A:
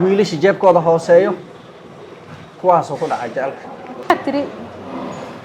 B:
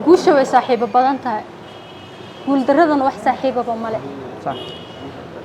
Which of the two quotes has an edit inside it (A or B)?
A